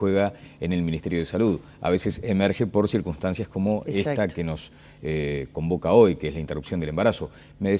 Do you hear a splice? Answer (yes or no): yes